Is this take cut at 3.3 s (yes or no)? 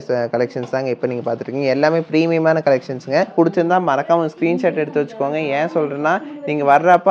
yes